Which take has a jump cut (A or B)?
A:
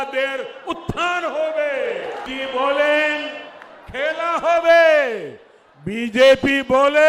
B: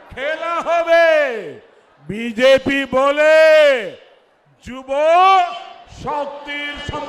A